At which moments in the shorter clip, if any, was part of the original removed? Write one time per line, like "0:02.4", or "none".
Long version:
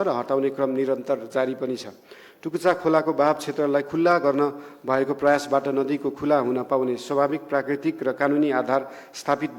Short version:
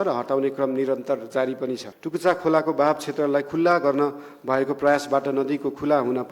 0:01.9